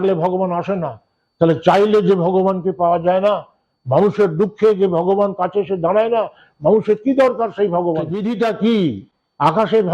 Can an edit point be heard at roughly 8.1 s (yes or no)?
yes